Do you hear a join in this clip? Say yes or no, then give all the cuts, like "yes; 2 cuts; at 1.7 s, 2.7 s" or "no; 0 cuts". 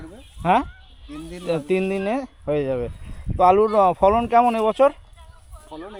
no; 0 cuts